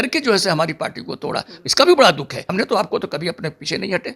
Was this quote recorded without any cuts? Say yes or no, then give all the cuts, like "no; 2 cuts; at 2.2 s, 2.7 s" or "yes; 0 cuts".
no; 1 cut; at 2.4 s